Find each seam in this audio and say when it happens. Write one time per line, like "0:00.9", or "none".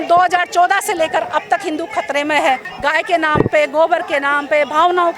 0:02.6